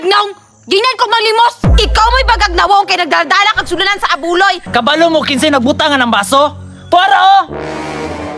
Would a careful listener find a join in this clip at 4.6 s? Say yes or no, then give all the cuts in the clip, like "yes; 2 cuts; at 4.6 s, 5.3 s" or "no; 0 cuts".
yes; 1 cut; at 4.6 s